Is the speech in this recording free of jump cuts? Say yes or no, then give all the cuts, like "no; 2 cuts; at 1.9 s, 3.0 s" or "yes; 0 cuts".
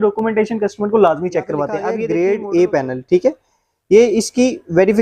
no; 1 cut; at 1.9 s